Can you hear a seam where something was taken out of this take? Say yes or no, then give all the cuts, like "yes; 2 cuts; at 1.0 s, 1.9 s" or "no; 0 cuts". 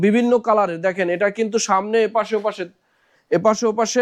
no; 0 cuts